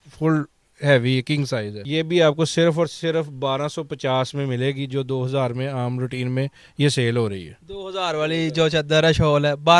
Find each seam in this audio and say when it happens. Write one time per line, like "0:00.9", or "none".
none